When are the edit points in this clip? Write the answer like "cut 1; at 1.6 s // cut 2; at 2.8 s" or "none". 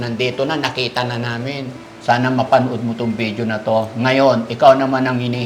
cut 1; at 1.9 s